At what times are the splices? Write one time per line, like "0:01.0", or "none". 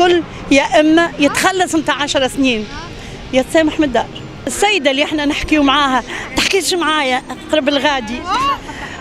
0:04.5